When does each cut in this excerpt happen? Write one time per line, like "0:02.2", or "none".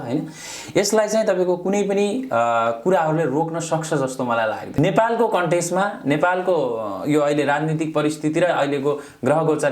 0:04.7